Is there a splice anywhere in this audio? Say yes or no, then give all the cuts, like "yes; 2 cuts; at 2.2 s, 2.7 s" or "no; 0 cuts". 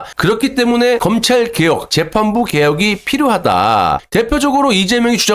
yes; 2 cuts; at 1.0 s, 4.0 s